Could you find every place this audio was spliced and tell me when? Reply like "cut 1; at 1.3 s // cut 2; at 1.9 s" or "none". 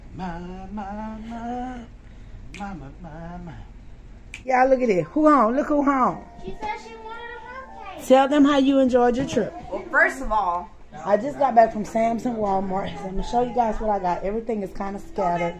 cut 1; at 4.5 s // cut 2; at 10.9 s